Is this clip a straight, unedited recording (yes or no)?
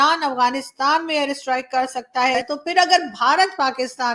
no